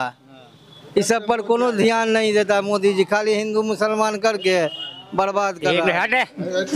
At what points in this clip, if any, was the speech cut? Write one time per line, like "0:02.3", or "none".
0:05.7